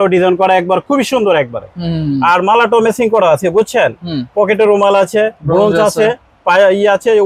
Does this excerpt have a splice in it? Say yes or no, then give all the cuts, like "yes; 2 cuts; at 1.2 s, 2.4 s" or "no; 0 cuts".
no; 0 cuts